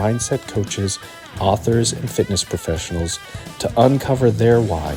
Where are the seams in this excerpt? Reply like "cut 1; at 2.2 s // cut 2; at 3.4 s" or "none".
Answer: none

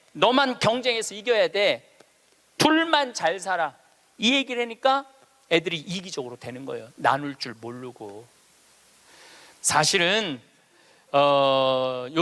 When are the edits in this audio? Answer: cut 1; at 9.6 s

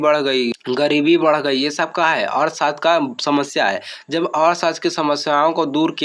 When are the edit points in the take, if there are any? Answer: none

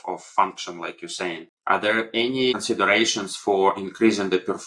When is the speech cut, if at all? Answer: cut 1; at 1.5 s // cut 2; at 2.5 s

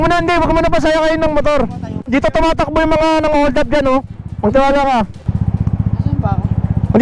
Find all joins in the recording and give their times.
cut 1; at 2.0 s // cut 2; at 4.1 s

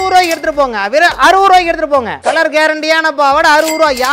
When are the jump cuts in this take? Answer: none

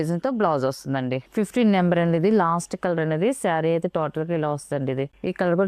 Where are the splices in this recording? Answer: cut 1; at 1.3 s

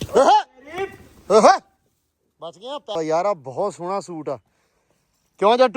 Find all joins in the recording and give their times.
cut 1; at 2.9 s

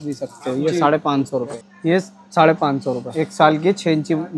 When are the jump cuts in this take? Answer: cut 1; at 1.6 s // cut 2; at 3.1 s

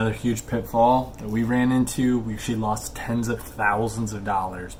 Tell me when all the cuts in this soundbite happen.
none

